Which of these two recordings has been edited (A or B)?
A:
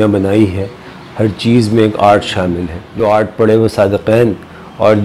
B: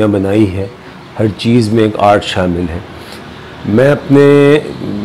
A